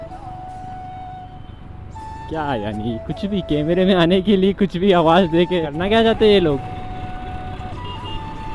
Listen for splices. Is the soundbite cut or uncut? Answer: cut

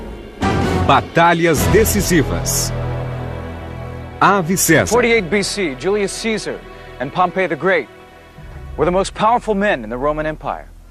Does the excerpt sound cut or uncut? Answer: uncut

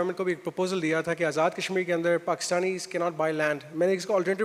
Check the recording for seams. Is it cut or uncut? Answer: uncut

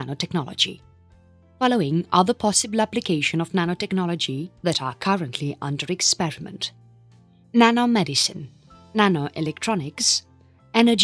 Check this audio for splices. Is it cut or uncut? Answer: uncut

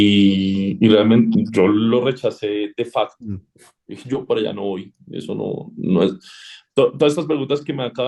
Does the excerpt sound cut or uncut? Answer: uncut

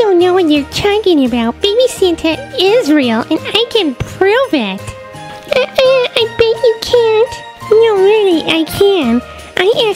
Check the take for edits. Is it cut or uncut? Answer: uncut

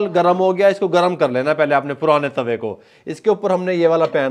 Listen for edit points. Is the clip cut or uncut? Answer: uncut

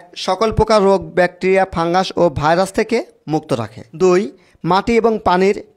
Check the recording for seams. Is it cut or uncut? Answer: cut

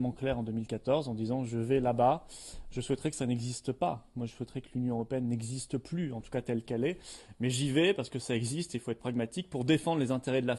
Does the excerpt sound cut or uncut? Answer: cut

